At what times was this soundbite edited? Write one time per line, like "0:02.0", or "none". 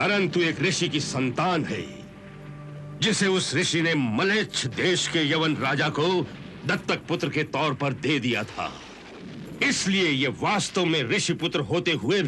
none